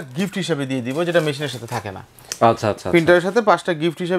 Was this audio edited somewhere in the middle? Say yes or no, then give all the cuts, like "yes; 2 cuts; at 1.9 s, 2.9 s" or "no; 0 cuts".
no; 0 cuts